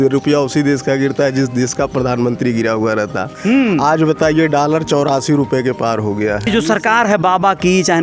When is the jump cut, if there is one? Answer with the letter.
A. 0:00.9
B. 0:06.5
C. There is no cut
B